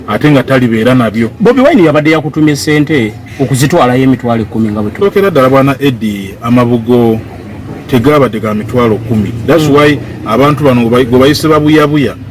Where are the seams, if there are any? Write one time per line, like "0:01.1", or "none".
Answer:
0:05.0